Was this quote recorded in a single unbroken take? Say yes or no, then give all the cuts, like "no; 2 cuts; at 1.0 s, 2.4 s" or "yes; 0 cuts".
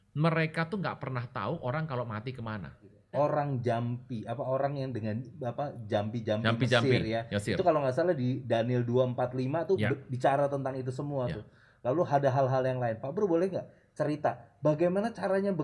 no; 1 cut; at 2.9 s